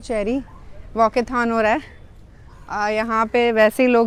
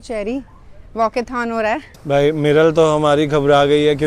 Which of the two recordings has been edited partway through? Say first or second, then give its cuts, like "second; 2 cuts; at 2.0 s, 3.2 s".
second; 1 cut; at 1.9 s